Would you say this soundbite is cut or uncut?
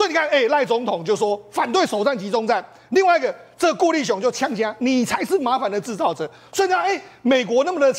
uncut